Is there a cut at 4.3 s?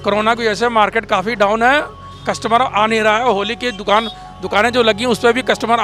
no; 0 cuts

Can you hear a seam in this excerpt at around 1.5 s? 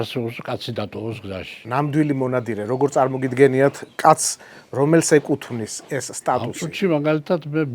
yes; 2 cuts; at 1.5 s, 6.5 s

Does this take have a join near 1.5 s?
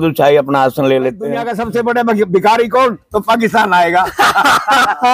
yes; 1 cut; at 1.5 s

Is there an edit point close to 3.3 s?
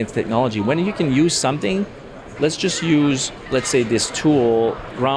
yes; 1 cut; at 3.3 s

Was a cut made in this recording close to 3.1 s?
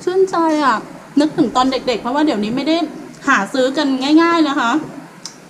no; 0 cuts

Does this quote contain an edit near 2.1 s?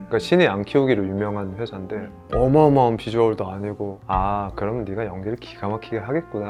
no; 0 cuts

